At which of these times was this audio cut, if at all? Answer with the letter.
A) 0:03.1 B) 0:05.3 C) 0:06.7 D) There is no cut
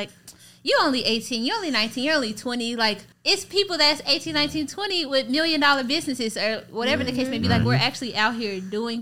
A